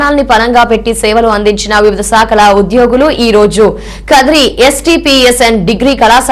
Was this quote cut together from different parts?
no; 0 cuts

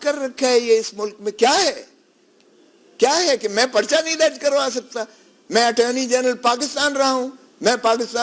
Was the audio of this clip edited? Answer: no; 0 cuts

